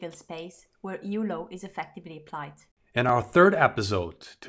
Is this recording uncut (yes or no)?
no